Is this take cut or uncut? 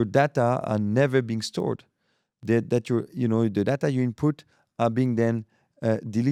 uncut